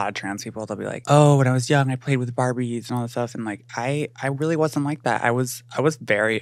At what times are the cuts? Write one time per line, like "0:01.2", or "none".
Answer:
0:01.0